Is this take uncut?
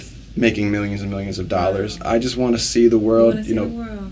yes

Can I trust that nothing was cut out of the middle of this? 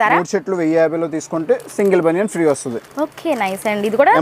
yes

